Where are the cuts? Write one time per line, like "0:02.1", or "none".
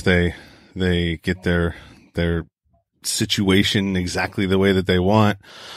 none

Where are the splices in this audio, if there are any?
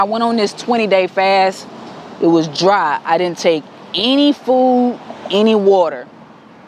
none

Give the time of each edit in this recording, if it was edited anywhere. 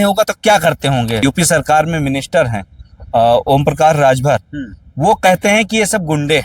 0:01.2

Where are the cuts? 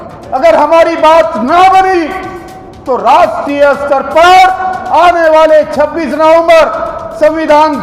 none

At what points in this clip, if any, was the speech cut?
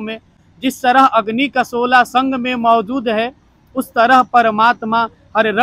none

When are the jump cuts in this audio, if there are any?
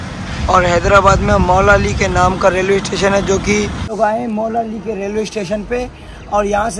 0:03.9

